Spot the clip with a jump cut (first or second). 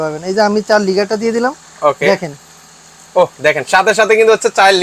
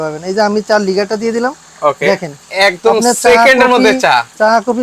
second